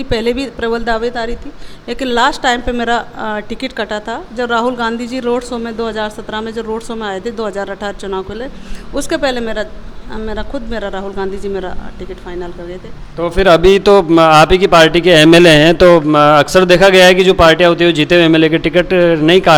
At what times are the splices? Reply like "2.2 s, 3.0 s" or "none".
none